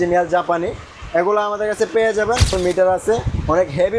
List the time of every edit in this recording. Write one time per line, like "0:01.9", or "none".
0:02.5